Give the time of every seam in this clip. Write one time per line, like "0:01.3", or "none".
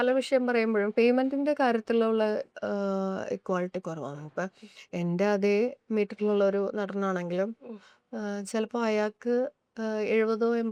none